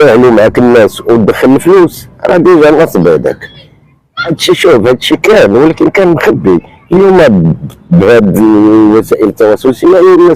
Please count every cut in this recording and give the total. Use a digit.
1